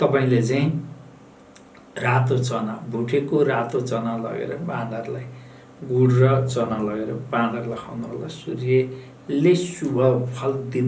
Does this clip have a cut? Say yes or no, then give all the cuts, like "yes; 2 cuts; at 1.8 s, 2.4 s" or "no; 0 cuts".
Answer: no; 0 cuts